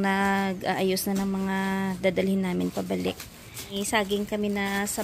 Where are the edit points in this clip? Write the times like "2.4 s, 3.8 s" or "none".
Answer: 3.8 s